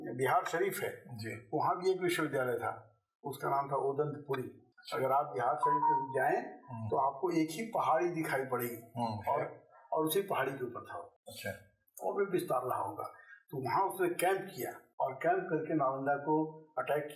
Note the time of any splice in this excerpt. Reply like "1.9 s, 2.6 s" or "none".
none

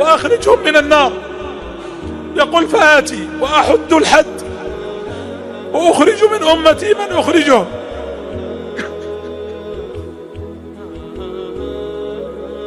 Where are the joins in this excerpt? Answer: 4.3 s, 5.7 s, 7.7 s

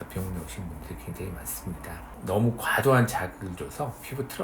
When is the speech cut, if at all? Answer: 2.1 s

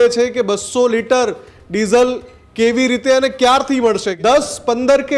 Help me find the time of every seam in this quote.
4.1 s

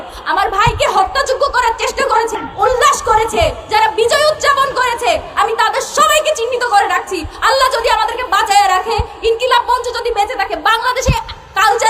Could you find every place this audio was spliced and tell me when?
2.4 s

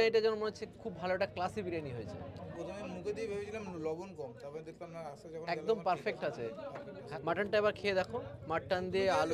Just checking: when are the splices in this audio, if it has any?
none

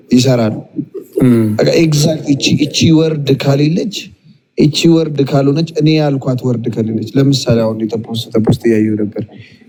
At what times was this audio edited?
none

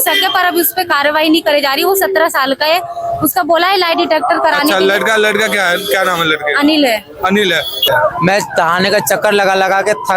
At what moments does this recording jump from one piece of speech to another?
7.8 s

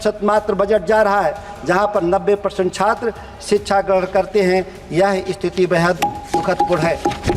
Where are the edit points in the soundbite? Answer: none

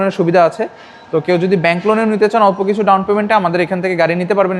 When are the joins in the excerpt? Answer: none

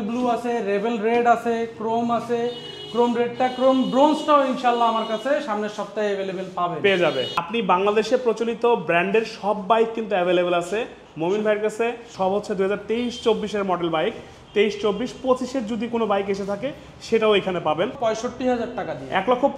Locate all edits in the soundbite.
7.5 s, 12.1 s, 17.9 s

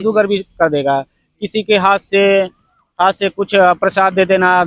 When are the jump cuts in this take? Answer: none

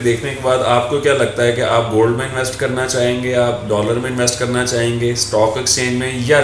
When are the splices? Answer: none

